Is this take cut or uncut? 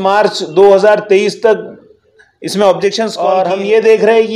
cut